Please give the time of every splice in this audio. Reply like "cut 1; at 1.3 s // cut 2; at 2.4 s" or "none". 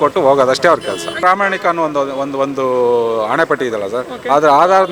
cut 1; at 1.1 s